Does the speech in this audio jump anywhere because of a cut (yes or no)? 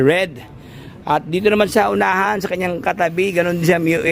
no